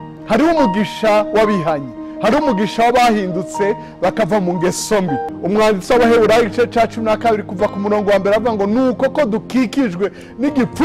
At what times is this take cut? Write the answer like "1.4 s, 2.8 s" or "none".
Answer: 5.3 s